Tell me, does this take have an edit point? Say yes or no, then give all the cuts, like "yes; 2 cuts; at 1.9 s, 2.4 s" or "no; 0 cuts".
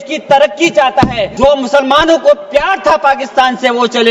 yes; 1 cut; at 1.3 s